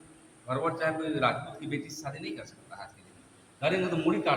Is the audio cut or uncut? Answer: uncut